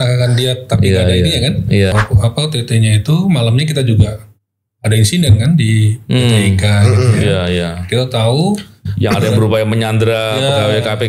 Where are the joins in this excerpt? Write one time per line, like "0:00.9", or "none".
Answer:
0:01.9